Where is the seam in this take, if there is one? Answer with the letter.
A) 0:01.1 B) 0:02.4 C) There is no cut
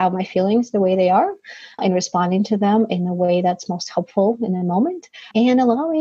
C